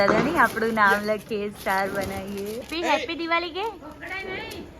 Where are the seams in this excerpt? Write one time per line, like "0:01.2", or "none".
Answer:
0:02.7